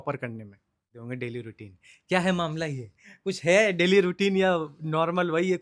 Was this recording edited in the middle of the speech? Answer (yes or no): yes